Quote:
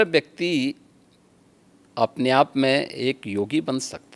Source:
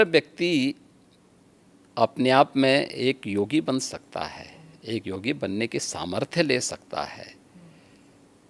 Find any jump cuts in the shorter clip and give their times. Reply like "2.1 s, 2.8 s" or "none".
none